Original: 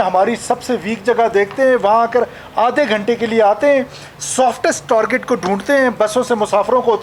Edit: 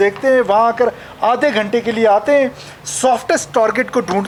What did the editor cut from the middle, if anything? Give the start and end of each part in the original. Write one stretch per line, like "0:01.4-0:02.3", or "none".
none